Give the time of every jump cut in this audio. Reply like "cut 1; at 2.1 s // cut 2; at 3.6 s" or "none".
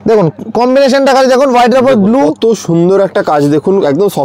none

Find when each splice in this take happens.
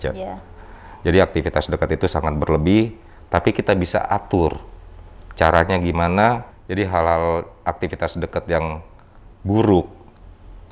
cut 1; at 6.6 s

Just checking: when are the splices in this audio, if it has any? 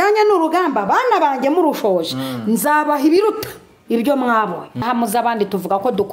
cut 1; at 4.8 s

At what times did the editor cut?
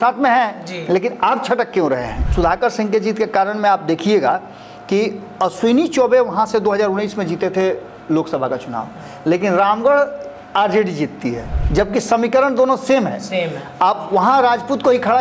cut 1; at 2.2 s // cut 2; at 11.5 s

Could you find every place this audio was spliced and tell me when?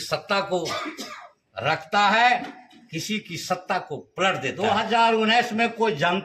cut 1; at 4.6 s

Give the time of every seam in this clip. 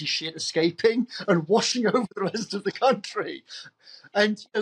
none

